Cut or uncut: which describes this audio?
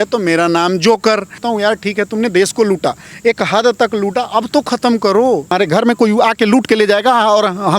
cut